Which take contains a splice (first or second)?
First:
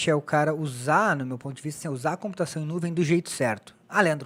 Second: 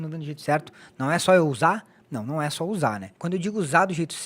second